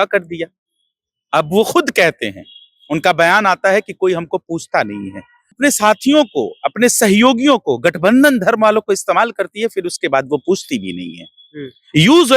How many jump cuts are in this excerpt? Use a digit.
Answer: 1